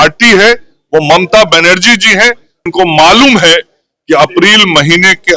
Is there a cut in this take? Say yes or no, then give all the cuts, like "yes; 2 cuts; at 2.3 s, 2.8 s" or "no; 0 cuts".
yes; 1 cut; at 2.7 s